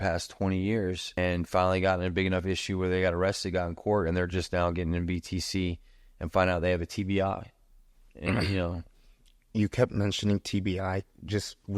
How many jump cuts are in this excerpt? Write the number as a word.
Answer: one